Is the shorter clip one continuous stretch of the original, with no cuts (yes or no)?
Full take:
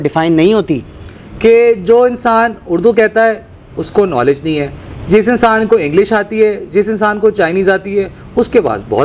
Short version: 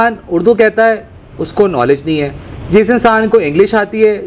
yes